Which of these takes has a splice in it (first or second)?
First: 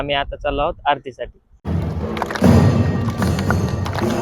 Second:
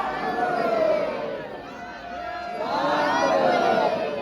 first